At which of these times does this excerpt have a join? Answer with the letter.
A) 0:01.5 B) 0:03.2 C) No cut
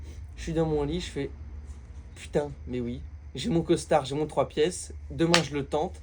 C